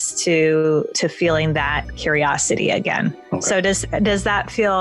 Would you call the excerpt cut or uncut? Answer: cut